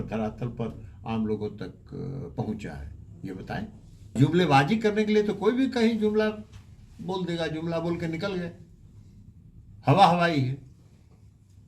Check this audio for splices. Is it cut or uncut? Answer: cut